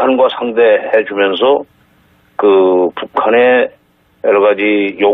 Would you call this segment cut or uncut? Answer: uncut